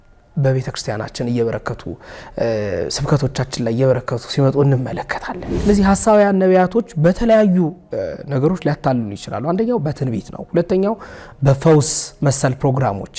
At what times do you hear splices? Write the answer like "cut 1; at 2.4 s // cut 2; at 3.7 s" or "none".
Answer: cut 1; at 5.4 s